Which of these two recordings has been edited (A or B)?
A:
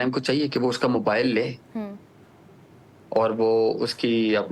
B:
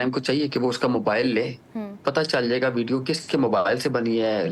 B